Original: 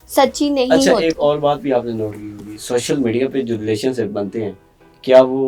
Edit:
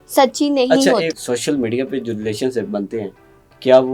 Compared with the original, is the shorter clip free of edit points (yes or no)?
no